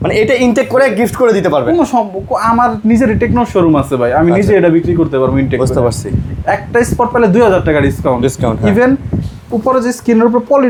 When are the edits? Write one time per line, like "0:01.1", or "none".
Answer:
none